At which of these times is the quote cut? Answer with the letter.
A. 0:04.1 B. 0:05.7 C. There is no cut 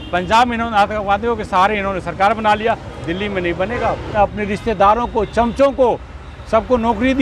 A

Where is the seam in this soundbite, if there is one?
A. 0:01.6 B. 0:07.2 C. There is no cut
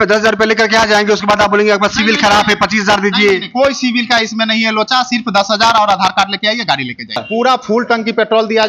B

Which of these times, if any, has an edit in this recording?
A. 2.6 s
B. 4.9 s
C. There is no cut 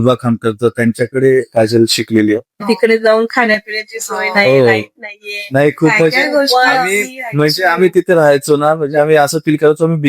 A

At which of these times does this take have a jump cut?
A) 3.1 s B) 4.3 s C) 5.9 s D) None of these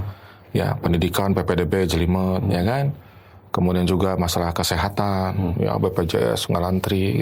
D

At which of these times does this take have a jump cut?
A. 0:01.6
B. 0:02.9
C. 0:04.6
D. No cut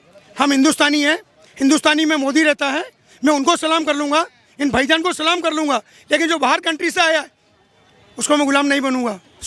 D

